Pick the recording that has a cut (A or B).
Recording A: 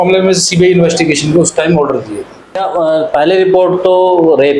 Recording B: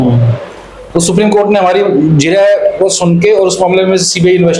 A